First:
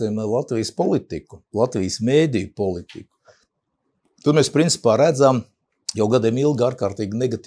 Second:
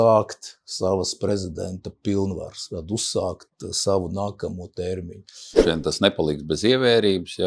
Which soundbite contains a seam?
second; 1 cut; at 5.6 s

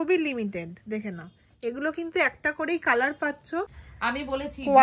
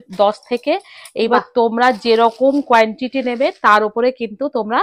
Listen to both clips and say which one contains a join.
first; 1 cut; at 3.8 s

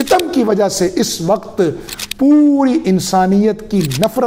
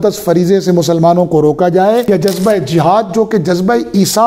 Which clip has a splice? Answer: second; 1 cut; at 2.0 s

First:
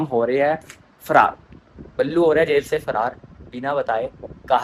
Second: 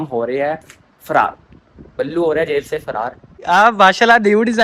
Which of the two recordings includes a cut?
second; 1 cut; at 3.4 s

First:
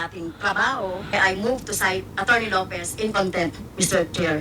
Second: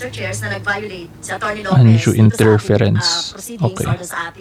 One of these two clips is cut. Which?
first; 1 cut; at 1.1 s

